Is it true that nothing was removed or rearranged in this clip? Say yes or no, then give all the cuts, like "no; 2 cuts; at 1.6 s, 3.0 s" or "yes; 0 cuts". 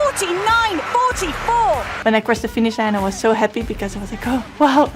no; 1 cut; at 1.9 s